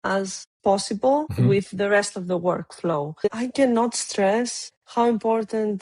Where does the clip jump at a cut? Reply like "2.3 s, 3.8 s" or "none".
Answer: 3.2 s